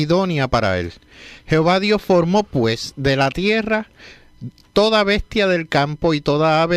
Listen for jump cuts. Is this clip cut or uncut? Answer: uncut